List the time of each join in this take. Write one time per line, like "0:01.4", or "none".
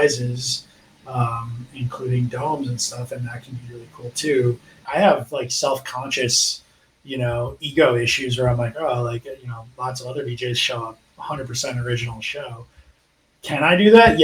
0:04.8